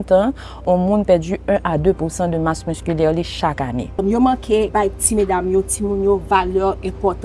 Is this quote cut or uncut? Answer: cut